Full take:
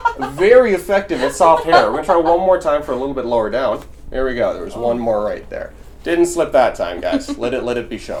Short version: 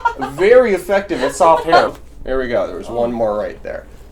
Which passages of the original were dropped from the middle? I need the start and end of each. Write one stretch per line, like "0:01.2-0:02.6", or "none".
0:01.9-0:03.8